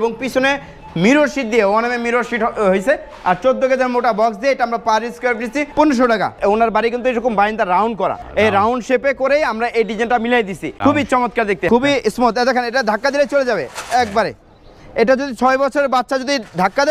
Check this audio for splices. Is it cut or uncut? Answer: cut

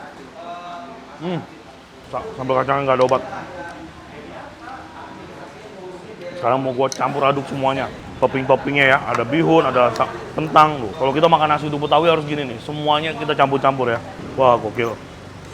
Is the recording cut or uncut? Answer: cut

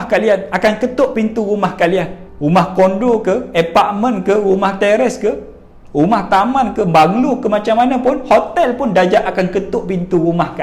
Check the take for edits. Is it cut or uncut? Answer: uncut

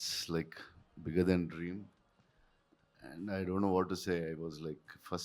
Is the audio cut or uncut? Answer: uncut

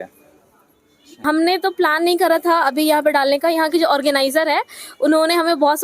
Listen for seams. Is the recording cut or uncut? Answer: cut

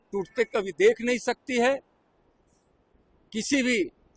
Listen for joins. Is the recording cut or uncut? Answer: uncut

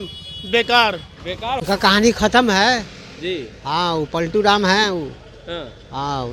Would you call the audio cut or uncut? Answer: cut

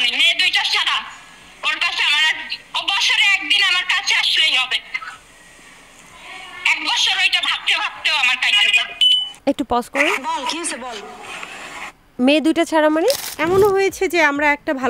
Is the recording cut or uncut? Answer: cut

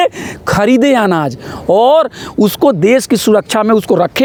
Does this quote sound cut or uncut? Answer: uncut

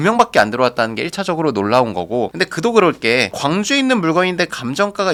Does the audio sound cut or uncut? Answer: uncut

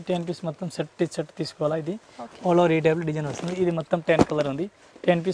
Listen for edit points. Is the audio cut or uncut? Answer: uncut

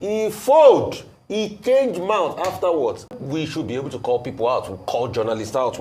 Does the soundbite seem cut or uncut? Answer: cut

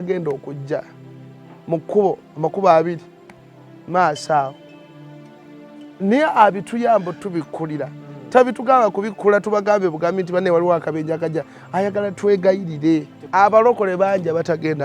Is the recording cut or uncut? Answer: cut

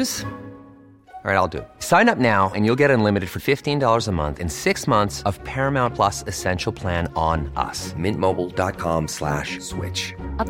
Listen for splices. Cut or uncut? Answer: uncut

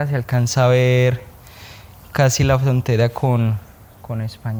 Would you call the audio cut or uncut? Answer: uncut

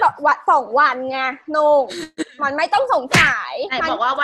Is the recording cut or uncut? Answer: uncut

